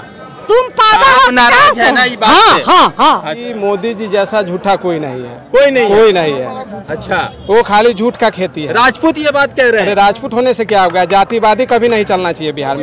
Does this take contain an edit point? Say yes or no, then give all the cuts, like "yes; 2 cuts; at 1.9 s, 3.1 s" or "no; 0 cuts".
yes; 1 cut; at 3.4 s